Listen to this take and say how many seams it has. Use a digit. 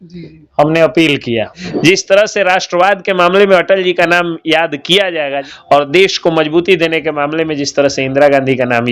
2